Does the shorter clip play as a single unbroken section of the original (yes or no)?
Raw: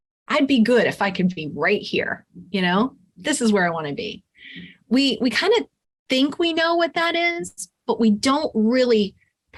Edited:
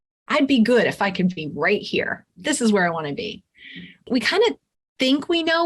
no